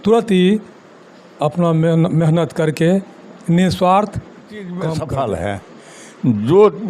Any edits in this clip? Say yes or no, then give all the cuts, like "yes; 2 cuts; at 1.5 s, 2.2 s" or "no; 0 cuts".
yes; 1 cut; at 4.8 s